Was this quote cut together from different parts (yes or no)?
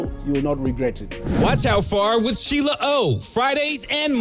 yes